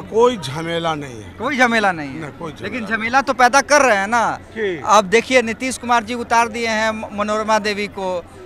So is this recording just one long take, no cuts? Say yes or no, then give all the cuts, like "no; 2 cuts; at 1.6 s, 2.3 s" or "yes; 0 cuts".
yes; 0 cuts